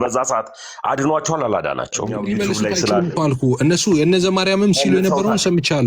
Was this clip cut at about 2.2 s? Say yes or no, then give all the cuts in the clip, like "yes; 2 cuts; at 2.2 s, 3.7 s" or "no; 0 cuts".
yes; 1 cut; at 2.2 s